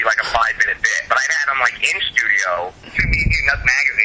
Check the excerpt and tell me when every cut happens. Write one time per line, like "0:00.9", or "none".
0:02.9